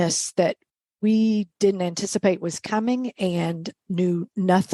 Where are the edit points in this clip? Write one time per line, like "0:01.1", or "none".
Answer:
0:03.7